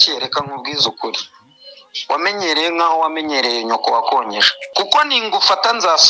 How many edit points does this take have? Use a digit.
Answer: 1